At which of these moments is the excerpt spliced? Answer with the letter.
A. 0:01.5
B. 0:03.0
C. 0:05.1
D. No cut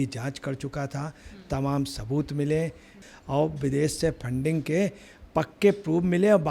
B